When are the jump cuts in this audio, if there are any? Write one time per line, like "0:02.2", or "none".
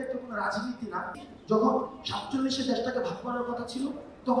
0:01.2

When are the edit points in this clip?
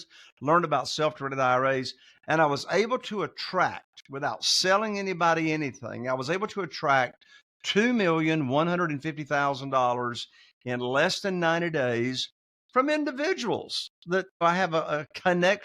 0:14.4

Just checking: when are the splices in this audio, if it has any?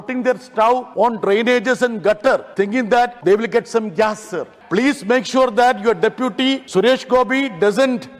0:00.9
0:02.7
0:04.5
0:06.6

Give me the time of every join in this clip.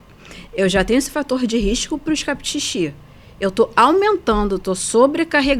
none

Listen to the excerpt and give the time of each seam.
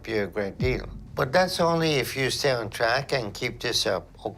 none

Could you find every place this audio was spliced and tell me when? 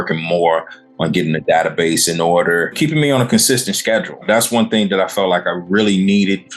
0:02.8
0:04.2

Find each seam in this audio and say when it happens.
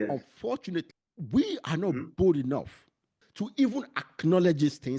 0:01.0
0:03.2

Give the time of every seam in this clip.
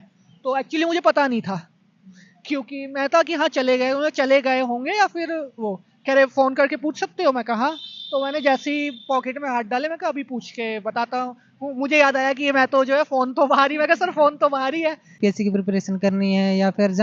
0:15.2

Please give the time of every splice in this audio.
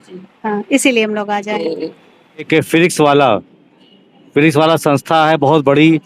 0:02.5

